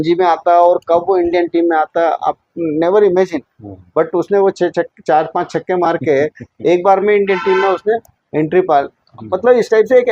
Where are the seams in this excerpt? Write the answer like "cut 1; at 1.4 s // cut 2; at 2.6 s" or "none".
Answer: none